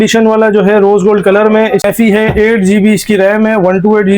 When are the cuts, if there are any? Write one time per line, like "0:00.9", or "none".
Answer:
0:01.8